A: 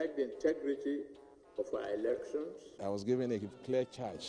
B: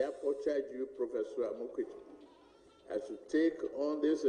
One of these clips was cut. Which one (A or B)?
A